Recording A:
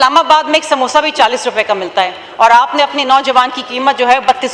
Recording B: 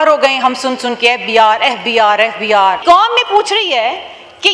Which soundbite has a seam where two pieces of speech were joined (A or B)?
B